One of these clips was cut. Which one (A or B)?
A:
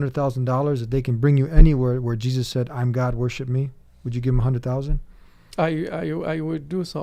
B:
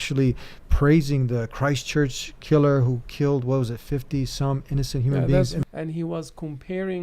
B